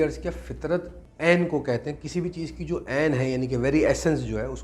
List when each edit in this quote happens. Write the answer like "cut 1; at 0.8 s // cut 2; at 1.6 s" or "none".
cut 1; at 1.0 s